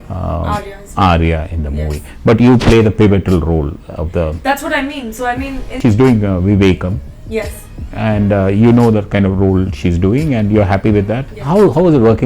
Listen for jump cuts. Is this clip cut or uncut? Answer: cut